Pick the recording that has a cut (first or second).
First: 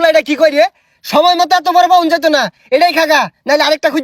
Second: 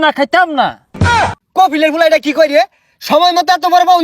second